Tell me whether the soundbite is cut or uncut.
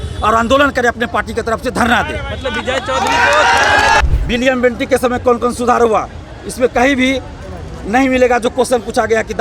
cut